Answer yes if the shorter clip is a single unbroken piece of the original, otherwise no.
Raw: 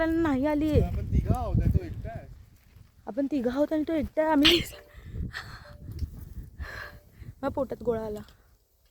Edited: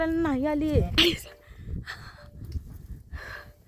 no